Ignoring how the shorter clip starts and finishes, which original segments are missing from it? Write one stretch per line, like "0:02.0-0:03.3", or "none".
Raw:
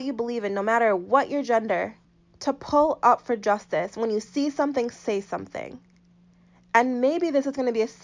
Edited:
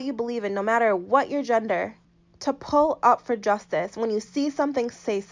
none